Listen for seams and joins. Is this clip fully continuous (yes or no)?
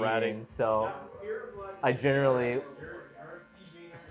yes